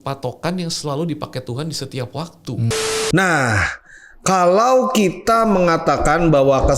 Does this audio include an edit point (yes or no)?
yes